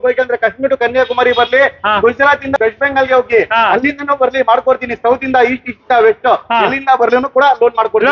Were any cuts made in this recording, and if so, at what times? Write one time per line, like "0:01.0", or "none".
none